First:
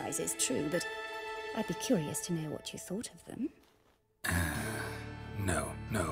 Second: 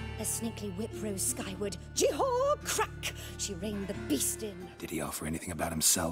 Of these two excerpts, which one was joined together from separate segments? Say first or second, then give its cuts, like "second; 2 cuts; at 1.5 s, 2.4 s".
second; 1 cut; at 4.7 s